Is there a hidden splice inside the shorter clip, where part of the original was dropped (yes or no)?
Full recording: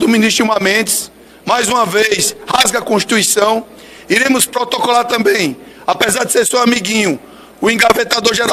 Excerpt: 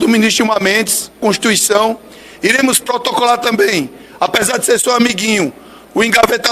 yes